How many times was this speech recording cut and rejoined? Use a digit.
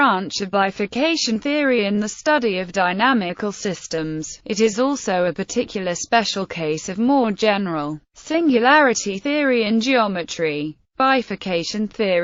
0